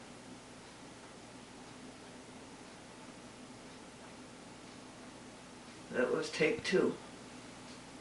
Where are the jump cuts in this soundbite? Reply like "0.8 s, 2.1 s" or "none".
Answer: none